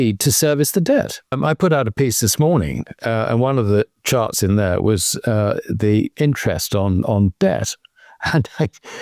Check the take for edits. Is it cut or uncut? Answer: cut